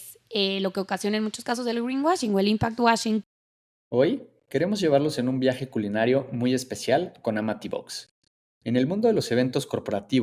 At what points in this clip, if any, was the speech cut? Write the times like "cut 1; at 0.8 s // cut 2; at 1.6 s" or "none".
cut 1; at 3.2 s